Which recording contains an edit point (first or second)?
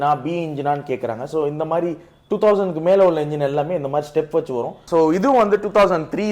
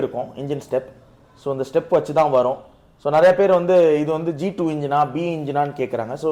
first